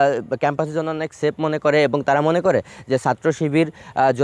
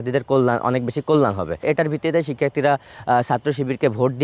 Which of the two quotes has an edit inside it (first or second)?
second